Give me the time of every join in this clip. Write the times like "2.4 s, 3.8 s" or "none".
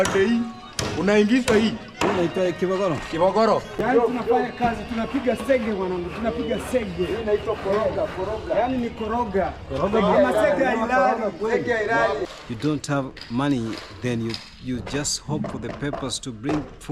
3.8 s, 12.3 s

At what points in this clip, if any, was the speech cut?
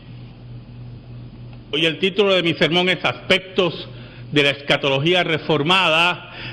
3.0 s

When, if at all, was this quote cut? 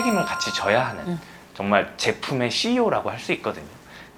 none

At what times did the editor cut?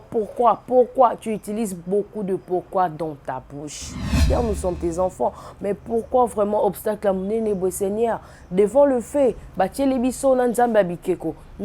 4.2 s

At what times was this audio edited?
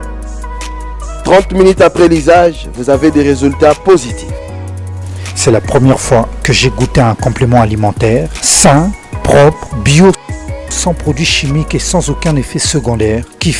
0.9 s

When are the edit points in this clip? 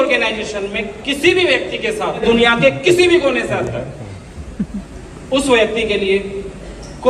2.2 s

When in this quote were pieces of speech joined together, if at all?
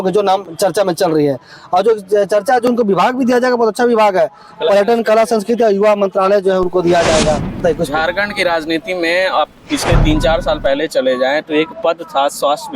7.6 s

